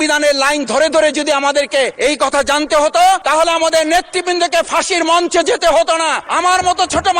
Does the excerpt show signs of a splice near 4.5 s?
no; 3 cuts; at 1.9 s, 3.2 s, 6.2 s

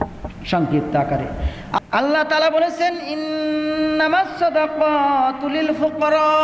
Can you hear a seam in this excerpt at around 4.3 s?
no; 1 cut; at 1.8 s

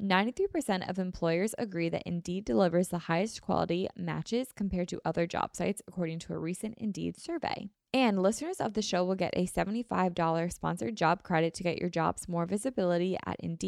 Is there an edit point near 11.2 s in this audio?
no; 1 cut; at 7.7 s

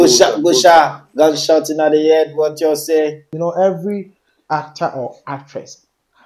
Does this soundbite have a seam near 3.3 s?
yes; 1 cut; at 3.3 s

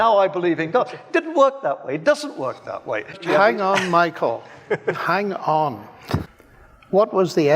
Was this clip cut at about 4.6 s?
no; 2 cuts; at 3.2 s, 6.3 s

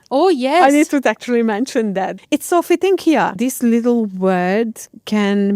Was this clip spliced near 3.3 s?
yes; 2 cuts; at 2.2 s, 3.3 s

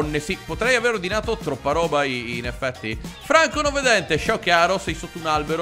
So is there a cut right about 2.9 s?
no; 0 cuts

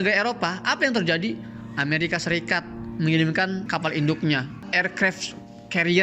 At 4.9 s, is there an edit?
no; 1 cut; at 3.7 s

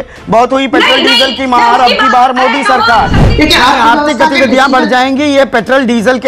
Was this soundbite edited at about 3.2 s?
yes; 1 cut; at 3.2 s

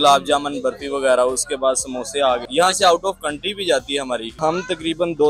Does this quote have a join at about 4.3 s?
yes; 2 cuts; at 2.4 s, 4.3 s

